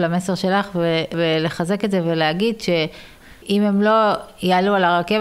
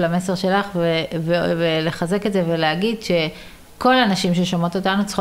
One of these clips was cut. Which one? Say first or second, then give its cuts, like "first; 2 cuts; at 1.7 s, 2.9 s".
first; 2 cuts; at 1.1 s, 3.2 s